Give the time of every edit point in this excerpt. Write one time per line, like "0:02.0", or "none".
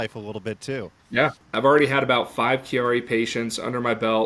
0:01.3